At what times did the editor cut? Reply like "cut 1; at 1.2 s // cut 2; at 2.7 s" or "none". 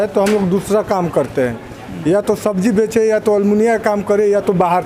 none

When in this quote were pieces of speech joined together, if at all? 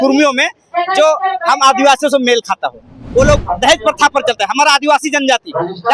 cut 1; at 3.0 s

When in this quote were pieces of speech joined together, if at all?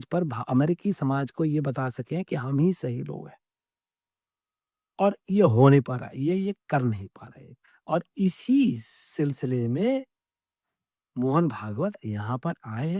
none

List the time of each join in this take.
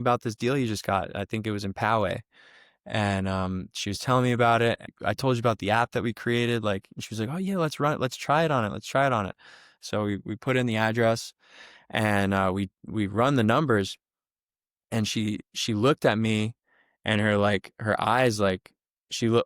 cut 1; at 4.8 s

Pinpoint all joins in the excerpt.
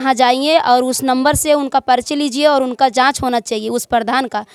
none

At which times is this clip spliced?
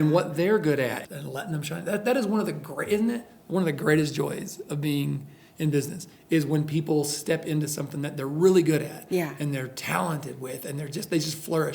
cut 1; at 1.0 s

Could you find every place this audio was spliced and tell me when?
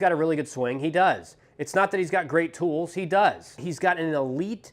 cut 1; at 3.6 s

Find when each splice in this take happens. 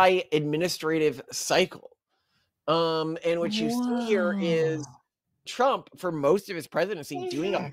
cut 1; at 5.4 s

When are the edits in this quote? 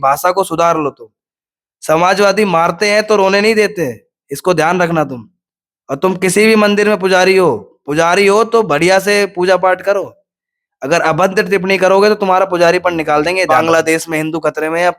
cut 1; at 13.5 s

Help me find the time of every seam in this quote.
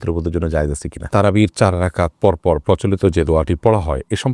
cut 1; at 1.0 s

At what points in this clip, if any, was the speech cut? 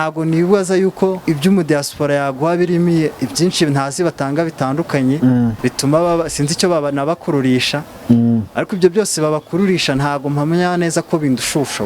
cut 1; at 1.2 s // cut 2; at 3.1 s // cut 3; at 5.6 s

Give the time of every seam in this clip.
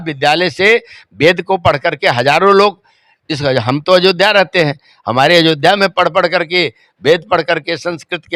none

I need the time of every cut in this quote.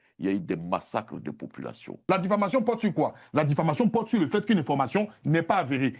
cut 1; at 1.9 s

